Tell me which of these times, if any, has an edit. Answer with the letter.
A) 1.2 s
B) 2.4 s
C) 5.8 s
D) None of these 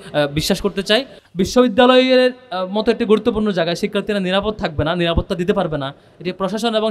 A